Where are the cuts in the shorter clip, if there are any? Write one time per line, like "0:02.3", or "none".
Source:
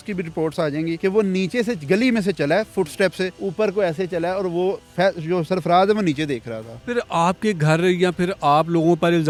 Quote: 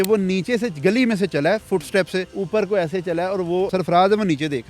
0:03.7